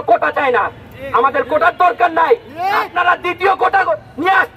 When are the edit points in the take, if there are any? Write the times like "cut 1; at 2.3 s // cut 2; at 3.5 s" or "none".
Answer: none